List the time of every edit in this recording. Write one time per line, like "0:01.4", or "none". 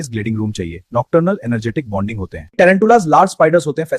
0:02.4